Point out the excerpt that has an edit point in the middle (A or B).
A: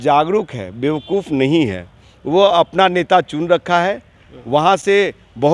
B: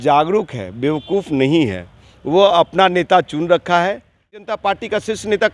B